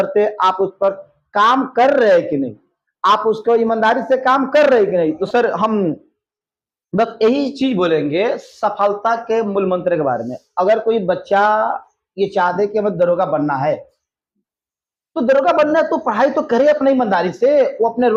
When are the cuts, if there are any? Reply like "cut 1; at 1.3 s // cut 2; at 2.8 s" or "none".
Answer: none

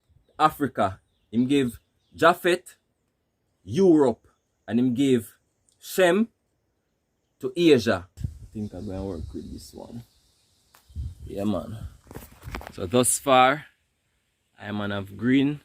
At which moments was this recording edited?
cut 1; at 8.1 s

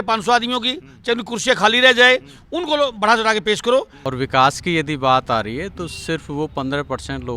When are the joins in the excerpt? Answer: cut 1; at 4.0 s

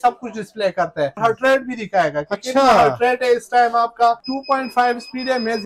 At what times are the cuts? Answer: cut 1; at 1.2 s // cut 2; at 4.3 s

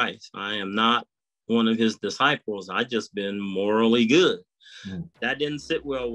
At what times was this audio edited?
cut 1; at 5.1 s

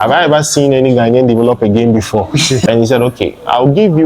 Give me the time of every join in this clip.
cut 1; at 2.7 s

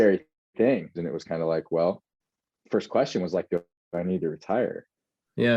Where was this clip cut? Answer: cut 1; at 1.0 s

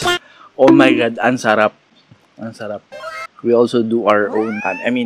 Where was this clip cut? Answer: cut 1; at 3.2 s

